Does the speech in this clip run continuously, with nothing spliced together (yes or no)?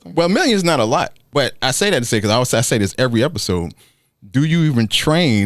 no